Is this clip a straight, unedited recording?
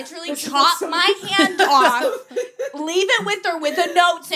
yes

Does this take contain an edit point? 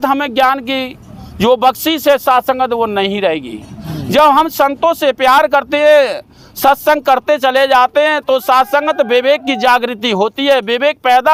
no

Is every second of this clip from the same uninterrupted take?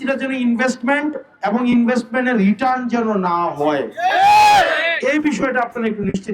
yes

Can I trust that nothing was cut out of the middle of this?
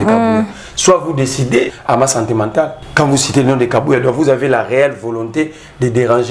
no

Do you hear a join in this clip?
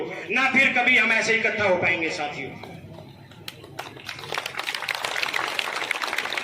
no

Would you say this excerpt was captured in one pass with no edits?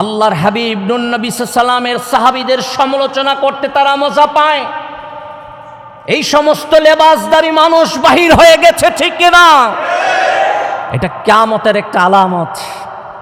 yes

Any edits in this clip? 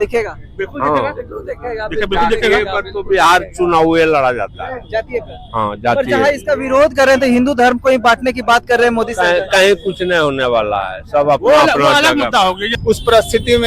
yes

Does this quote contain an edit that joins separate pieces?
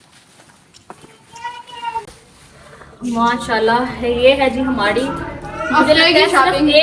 no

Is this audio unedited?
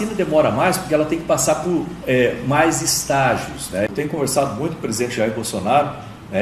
no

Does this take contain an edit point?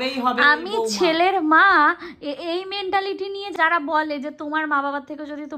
yes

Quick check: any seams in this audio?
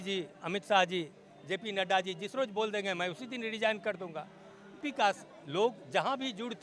yes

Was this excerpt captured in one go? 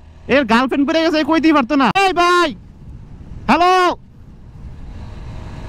no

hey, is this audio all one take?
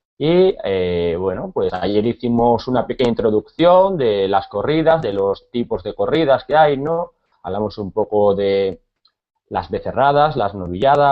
yes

